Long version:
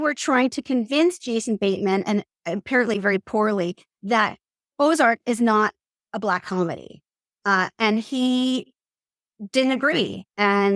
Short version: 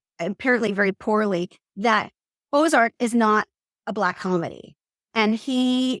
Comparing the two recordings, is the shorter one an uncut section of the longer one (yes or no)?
no